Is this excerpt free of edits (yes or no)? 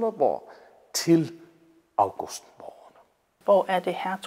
no